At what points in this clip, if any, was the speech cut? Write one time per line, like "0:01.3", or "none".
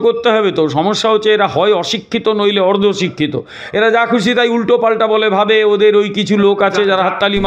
none